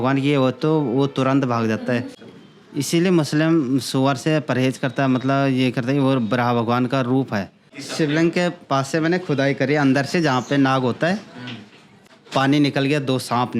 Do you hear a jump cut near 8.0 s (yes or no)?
yes